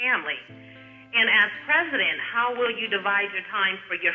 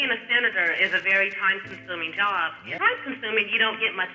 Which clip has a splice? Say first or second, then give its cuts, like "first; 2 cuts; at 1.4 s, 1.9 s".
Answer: second; 1 cut; at 2.7 s